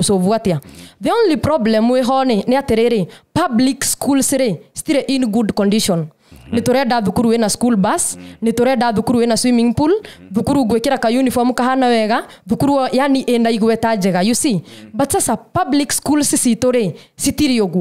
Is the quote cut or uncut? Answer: uncut